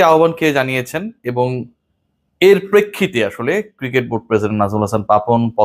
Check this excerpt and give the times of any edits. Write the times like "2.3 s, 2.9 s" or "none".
none